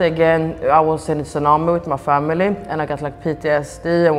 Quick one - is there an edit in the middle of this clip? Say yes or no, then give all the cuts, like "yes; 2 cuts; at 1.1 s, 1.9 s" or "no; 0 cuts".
no; 0 cuts